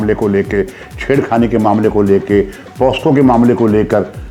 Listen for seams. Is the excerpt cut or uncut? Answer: uncut